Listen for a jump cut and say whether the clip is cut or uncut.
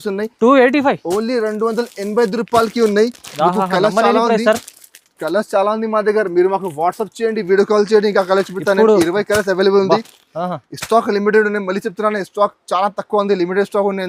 uncut